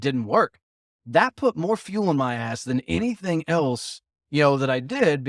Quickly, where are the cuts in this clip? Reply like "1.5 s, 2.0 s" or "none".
none

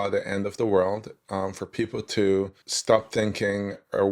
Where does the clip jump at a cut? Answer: 2.6 s

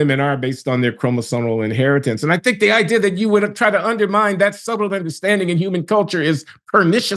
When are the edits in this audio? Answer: none

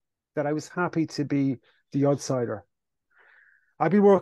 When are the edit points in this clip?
3.0 s

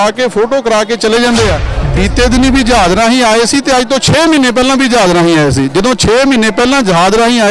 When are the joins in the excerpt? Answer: 1.7 s

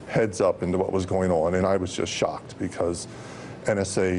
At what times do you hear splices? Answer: 1.7 s

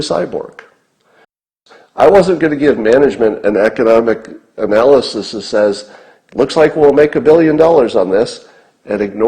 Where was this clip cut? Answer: 1.4 s

